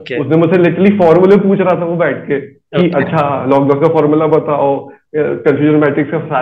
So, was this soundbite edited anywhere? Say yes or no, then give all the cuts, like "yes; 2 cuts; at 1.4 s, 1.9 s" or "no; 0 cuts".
no; 0 cuts